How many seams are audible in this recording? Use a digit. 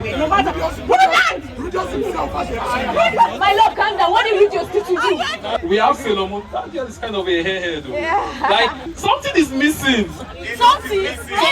2